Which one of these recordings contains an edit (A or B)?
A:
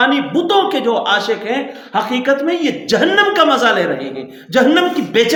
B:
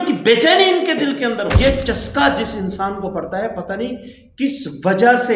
B